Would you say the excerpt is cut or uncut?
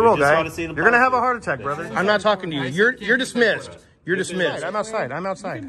cut